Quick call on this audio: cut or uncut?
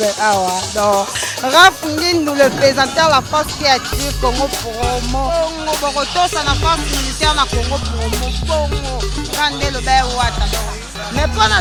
uncut